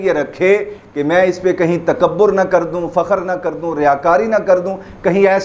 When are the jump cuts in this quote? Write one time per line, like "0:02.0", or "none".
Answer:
none